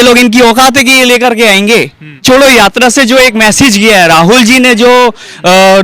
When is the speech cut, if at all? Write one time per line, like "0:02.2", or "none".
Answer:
0:02.2